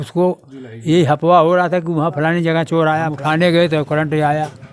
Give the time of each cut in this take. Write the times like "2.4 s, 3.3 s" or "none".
3.1 s